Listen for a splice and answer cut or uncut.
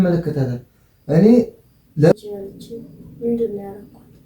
cut